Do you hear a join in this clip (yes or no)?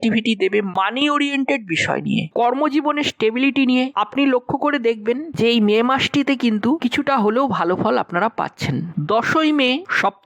yes